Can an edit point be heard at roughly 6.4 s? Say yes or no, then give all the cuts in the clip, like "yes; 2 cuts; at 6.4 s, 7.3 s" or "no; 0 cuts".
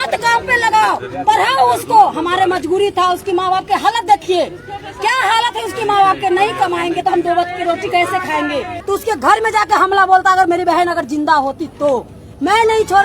no; 1 cut; at 8.7 s